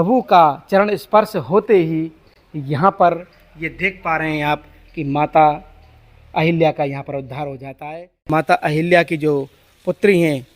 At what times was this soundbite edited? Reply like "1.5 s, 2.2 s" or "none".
8.3 s